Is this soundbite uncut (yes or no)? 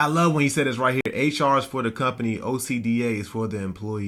yes